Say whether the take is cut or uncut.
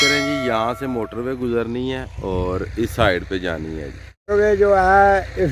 cut